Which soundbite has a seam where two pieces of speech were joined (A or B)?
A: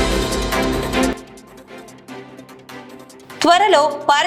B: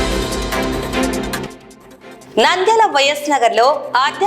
B